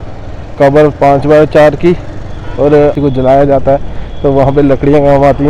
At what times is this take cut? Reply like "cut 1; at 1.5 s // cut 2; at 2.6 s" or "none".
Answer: none